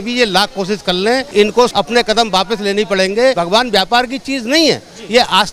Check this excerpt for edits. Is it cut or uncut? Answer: cut